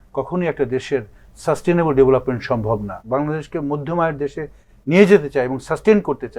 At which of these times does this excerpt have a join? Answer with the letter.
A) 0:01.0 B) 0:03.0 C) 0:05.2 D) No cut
B